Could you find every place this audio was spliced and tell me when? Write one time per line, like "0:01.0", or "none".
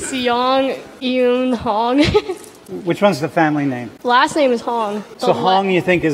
0:00.9
0:02.6
0:03.9
0:05.0

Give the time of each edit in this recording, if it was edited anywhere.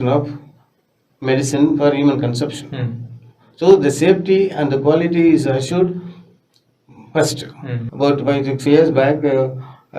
0:07.8

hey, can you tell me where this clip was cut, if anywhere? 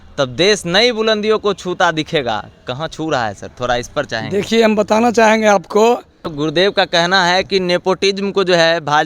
0:06.3

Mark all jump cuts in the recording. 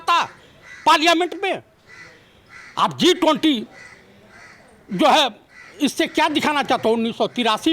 none

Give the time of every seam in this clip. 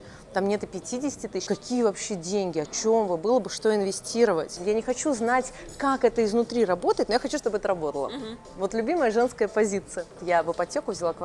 0:01.4
0:04.5
0:10.2

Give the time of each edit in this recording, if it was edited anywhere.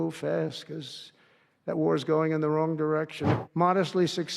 0:03.2

